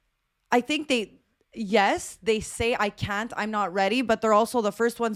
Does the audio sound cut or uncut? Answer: uncut